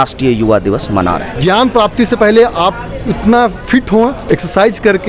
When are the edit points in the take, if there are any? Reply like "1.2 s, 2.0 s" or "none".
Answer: 1.3 s, 4.2 s